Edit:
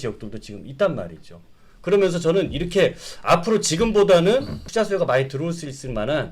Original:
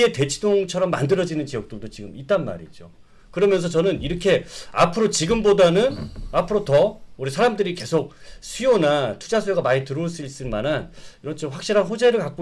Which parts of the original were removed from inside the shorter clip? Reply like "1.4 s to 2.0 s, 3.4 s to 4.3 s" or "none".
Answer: 6.1 s to 9.2 s

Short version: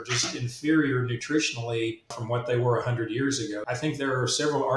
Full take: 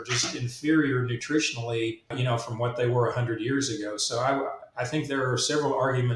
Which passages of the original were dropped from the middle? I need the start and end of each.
2.1 s to 2.4 s, 3.9 s to 4.7 s

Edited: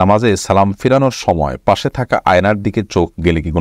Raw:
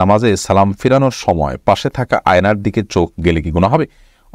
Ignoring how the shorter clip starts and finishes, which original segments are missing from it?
none

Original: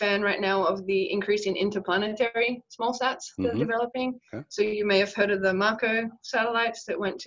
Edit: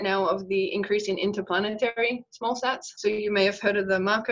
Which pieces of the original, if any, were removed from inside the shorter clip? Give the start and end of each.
3.3 s to 4.4 s

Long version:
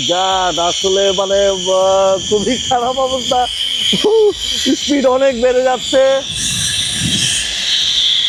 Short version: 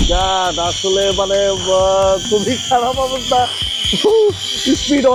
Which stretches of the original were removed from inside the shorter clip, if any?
none

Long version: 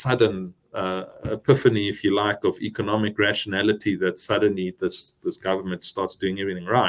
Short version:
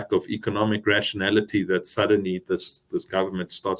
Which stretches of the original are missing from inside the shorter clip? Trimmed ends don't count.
none

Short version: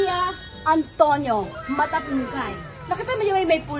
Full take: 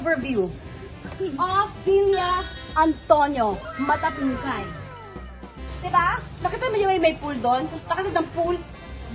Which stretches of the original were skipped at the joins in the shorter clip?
4.8 s to 6.3 s

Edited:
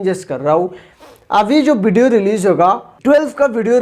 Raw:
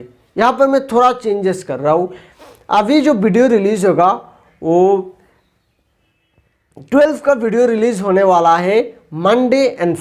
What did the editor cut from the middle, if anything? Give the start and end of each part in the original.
4.3 s to 6.8 s

